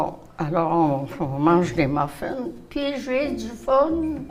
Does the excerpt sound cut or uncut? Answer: uncut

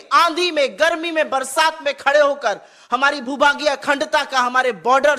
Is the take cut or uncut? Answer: uncut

